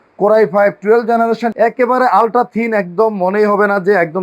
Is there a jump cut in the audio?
yes; 1 cut; at 1.5 s

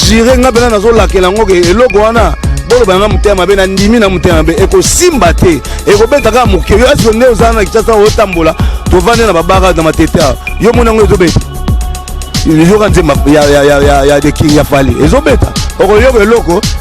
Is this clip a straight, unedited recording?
yes; 0 cuts

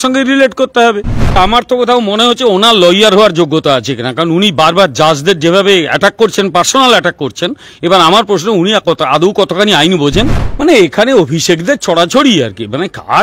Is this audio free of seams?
no; 2 cuts; at 1.4 s, 10.4 s

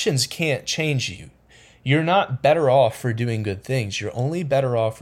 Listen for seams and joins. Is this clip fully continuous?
yes; 0 cuts

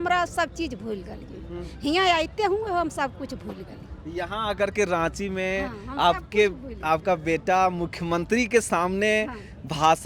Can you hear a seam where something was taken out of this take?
no; 0 cuts

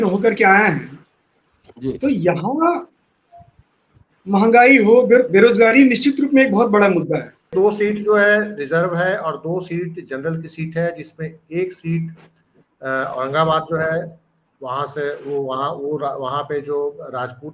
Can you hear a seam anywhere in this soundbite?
yes; 1 cut; at 7.5 s

